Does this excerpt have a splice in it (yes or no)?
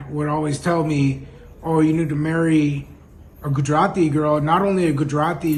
no